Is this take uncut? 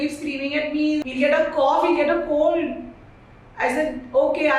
yes; 0 cuts

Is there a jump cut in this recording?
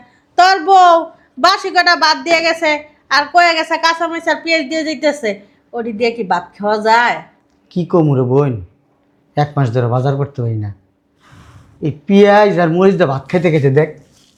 no; 0 cuts

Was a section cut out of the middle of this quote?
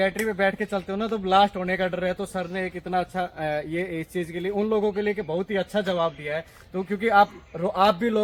no; 0 cuts

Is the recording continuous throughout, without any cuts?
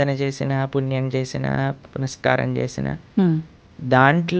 yes; 0 cuts

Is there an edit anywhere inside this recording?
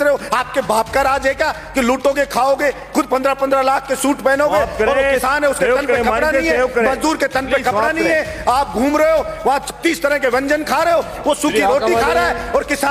no; 0 cuts

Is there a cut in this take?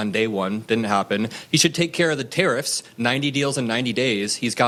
no; 0 cuts

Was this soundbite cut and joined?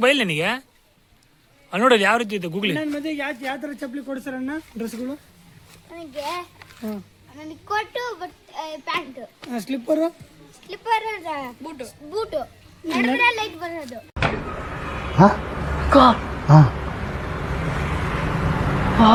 no; 0 cuts

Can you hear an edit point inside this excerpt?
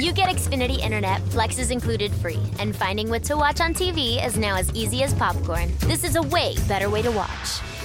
no; 0 cuts

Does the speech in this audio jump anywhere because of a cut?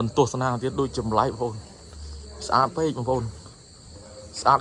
no; 0 cuts

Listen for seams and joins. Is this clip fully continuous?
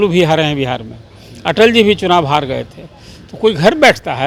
yes; 0 cuts

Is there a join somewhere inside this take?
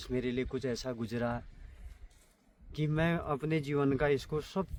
no; 0 cuts

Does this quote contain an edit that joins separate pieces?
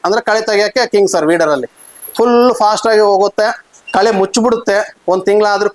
no; 0 cuts

